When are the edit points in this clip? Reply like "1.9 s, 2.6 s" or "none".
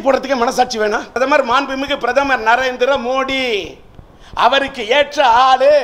1.2 s